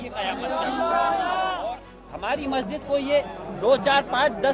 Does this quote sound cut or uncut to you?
cut